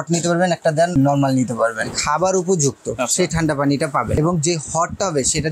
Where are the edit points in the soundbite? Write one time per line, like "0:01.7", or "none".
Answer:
0:00.9
0:01.9
0:04.1